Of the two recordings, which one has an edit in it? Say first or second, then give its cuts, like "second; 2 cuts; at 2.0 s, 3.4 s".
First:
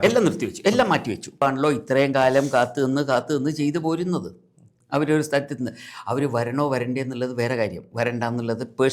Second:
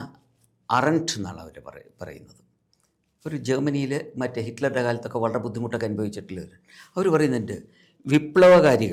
first; 1 cut; at 1.4 s